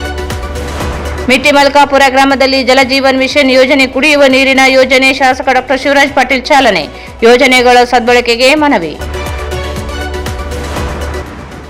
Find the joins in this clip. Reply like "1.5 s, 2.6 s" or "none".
none